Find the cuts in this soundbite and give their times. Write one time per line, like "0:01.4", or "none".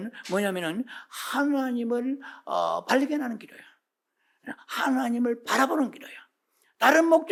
none